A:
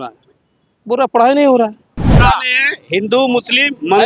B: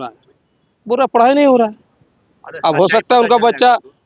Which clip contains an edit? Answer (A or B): A